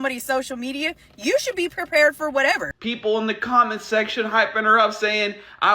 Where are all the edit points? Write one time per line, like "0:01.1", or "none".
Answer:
0:02.7